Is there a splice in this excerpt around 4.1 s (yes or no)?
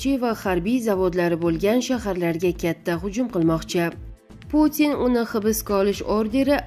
yes